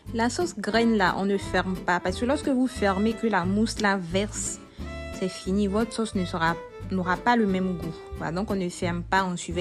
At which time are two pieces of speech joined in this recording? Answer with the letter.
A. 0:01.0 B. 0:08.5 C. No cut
C